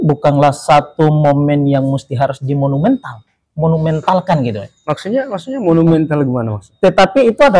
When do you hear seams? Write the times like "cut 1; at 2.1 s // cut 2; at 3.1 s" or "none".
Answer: none